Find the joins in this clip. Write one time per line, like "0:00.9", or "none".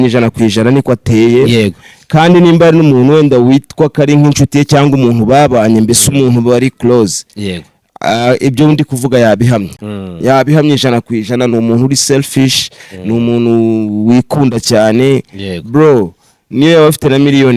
none